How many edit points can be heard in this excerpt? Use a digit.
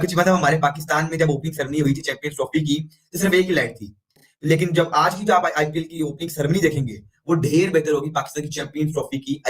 1